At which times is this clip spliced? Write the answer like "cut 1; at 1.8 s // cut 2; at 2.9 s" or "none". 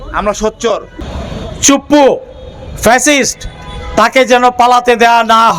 cut 1; at 1.1 s